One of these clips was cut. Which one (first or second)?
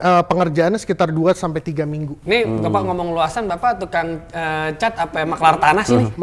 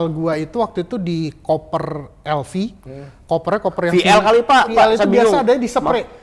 second